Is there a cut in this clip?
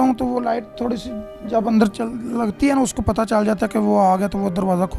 no; 0 cuts

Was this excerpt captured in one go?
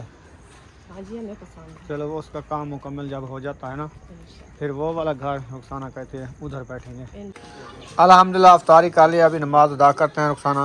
no; 1 cut; at 7.4 s

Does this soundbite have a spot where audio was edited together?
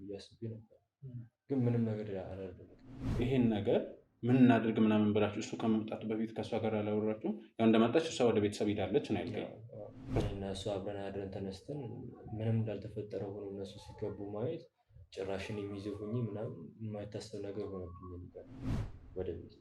yes; 3 cuts; at 3.1 s, 10.2 s, 18.6 s

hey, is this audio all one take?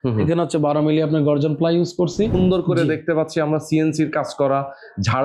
no; 1 cut; at 2.4 s

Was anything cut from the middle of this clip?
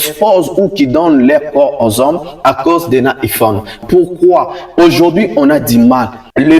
yes; 1 cut; at 3.8 s

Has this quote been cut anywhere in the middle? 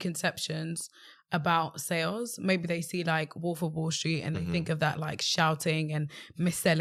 no; 0 cuts

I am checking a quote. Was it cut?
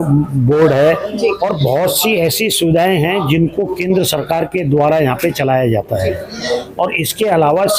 no; 0 cuts

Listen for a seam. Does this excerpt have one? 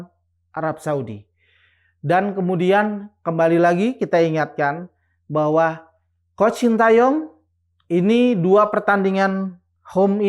no; 0 cuts

